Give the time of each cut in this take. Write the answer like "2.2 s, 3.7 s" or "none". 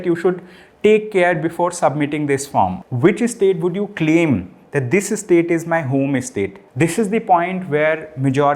2.8 s, 6.6 s

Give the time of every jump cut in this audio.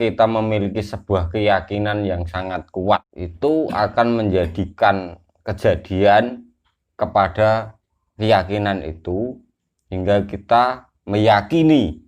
3.2 s

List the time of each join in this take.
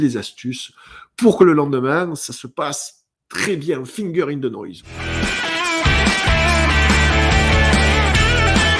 4.9 s

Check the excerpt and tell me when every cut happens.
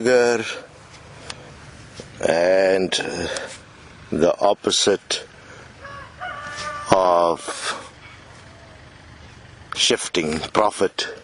none

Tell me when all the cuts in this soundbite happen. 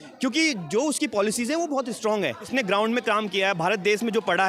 2.5 s

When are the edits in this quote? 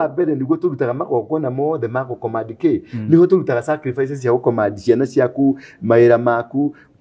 none

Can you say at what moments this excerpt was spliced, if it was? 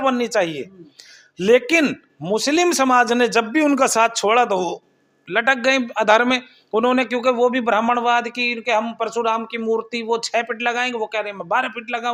none

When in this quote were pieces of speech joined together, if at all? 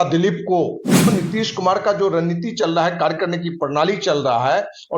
1.1 s

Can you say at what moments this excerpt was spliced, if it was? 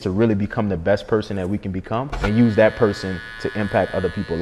2.2 s

